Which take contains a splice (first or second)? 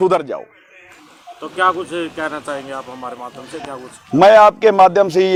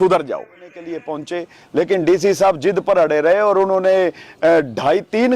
second